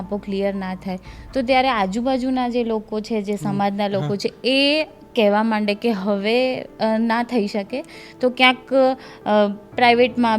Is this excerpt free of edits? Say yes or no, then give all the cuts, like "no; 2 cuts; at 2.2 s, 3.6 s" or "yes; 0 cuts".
yes; 0 cuts